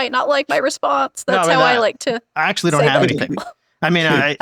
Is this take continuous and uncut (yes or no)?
yes